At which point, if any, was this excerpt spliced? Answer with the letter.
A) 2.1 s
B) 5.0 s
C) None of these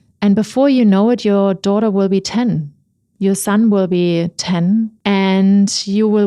B